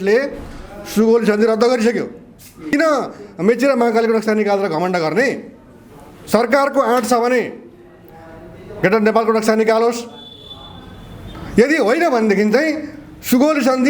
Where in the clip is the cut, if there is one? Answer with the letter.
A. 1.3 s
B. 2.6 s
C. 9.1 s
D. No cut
B